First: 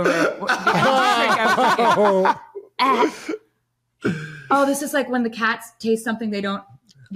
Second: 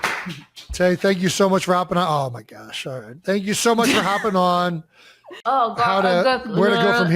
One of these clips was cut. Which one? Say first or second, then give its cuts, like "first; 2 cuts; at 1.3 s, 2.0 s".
second; 1 cut; at 5.3 s